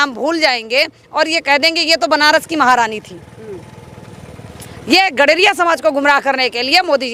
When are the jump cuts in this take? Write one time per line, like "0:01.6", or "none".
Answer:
none